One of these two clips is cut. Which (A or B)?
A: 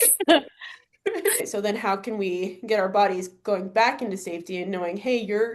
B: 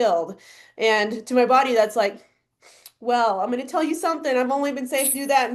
A